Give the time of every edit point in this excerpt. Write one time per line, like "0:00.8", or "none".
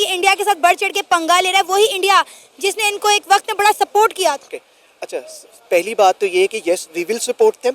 0:04.6